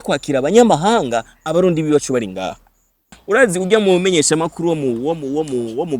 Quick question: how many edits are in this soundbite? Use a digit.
1